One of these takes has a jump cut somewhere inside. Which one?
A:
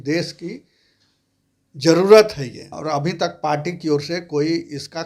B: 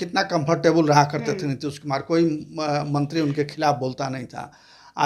A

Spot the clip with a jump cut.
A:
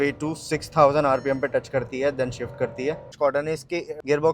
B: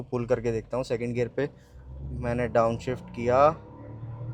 A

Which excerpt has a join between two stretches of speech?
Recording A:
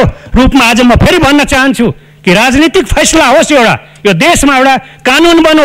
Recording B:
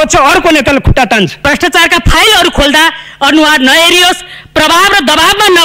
B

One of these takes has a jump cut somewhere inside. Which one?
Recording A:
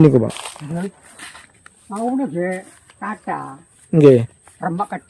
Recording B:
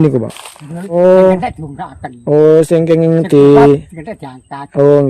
B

